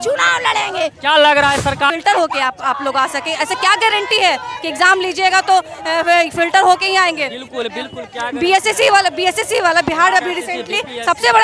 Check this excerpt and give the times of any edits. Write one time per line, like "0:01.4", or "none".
0:01.9